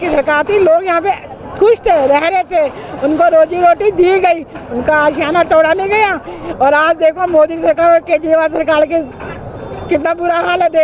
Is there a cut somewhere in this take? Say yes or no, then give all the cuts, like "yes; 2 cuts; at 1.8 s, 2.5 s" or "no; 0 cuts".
no; 0 cuts